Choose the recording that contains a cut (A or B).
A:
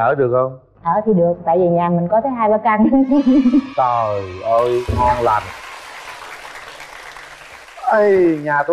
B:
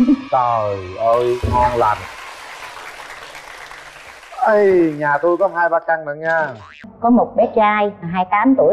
B